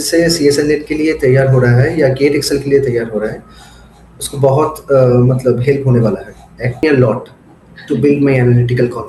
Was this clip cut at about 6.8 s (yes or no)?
yes